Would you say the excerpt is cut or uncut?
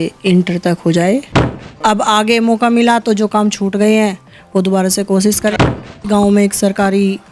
cut